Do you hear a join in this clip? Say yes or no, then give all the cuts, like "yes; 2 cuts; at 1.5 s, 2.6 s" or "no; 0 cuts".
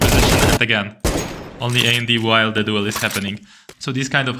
no; 0 cuts